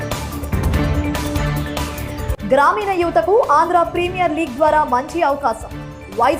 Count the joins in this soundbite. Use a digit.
0